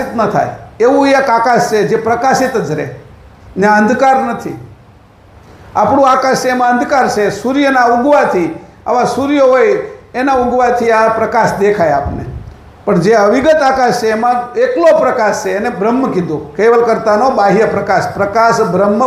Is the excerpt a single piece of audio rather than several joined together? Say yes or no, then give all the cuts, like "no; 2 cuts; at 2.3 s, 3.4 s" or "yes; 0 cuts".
yes; 0 cuts